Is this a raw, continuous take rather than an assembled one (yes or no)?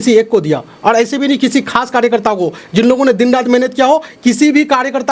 yes